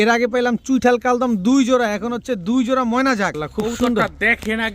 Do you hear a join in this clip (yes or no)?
yes